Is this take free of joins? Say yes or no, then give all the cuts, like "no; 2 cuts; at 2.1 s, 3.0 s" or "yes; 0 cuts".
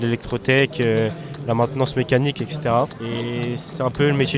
no; 1 cut; at 3.0 s